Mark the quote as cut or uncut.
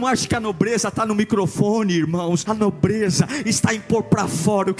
cut